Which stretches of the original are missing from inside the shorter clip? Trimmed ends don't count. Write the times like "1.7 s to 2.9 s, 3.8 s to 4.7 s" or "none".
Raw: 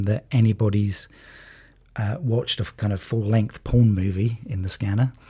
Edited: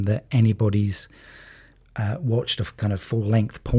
none